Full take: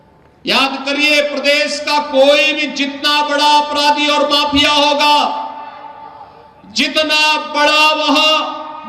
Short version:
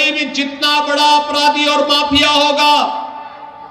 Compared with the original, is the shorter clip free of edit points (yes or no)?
yes